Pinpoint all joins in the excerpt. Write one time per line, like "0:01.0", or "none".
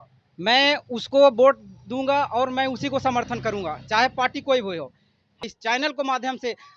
0:05.4